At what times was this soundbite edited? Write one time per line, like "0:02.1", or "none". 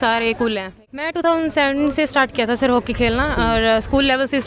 0:01.2

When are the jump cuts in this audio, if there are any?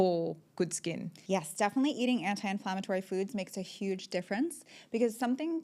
0:01.1

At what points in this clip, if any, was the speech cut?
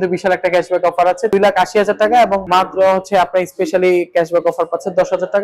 0:01.3
0:02.4

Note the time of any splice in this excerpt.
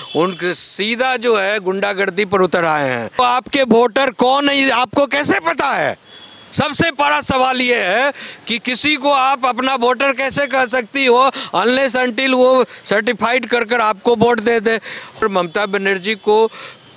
0:03.2
0:15.2

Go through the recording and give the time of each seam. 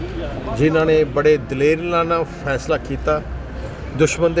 none

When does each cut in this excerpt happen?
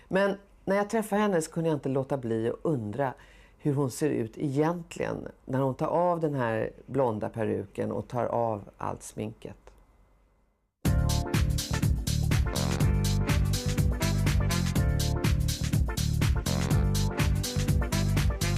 0:08.0

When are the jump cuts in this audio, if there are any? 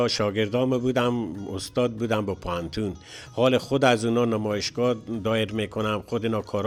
none

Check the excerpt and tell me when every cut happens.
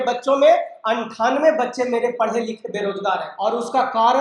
0:03.3

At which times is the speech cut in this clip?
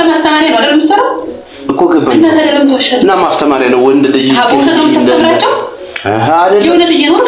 none

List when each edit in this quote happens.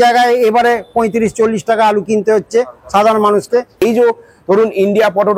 0:03.8

